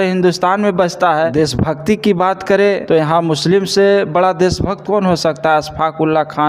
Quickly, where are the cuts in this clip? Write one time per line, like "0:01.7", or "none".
0:01.3
0:02.8

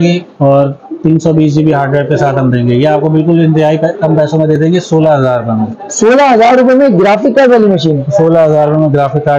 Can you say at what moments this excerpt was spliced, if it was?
none

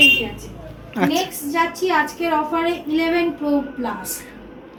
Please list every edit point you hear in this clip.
none

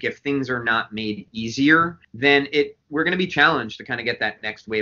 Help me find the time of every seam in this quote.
0:02.0

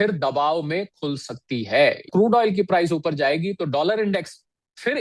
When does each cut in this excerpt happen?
0:02.1

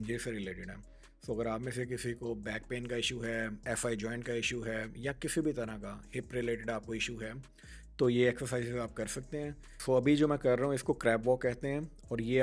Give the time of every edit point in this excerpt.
none

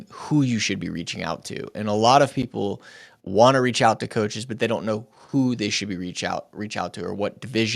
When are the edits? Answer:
0:03.1

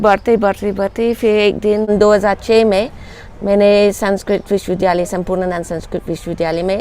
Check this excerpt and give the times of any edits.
0:01.9

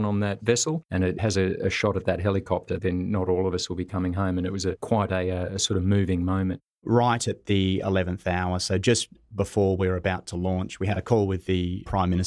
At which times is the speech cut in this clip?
0:06.7

